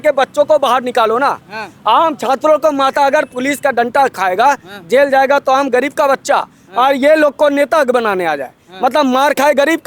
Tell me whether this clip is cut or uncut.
uncut